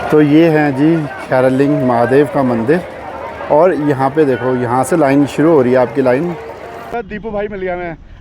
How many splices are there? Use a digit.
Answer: 1